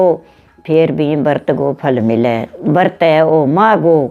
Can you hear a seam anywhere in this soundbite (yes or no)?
yes